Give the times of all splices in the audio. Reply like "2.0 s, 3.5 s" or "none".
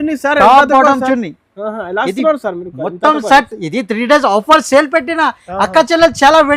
none